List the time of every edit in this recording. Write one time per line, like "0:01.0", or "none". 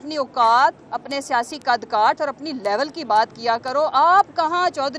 none